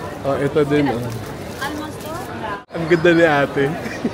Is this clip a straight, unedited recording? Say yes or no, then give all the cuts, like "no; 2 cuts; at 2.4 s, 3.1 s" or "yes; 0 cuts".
no; 1 cut; at 2.7 s